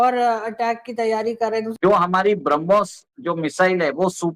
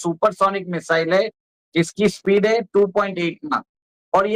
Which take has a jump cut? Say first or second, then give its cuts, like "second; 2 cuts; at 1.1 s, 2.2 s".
first; 1 cut; at 1.7 s